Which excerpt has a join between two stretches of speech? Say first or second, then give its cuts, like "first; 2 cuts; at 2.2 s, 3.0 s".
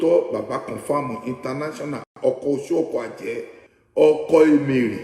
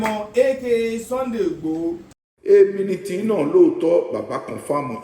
second; 1 cut; at 2.2 s